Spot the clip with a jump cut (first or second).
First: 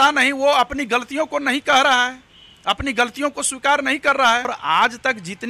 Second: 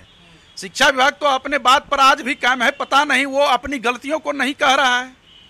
first